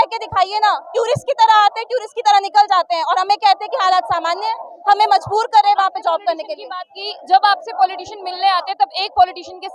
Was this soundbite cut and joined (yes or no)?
no